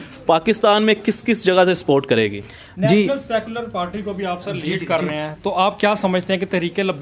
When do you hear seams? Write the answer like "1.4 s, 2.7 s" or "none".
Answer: none